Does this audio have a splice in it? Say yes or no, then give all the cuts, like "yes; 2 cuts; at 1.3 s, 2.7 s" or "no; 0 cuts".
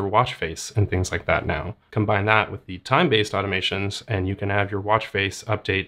yes; 1 cut; at 1.8 s